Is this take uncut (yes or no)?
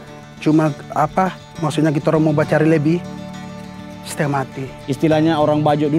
no